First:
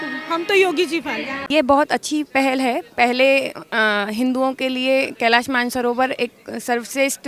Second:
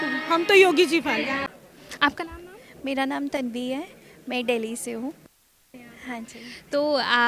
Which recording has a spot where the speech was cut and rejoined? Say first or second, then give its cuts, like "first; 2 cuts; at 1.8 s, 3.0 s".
first; 1 cut; at 1.5 s